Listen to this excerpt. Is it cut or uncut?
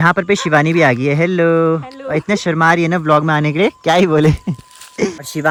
uncut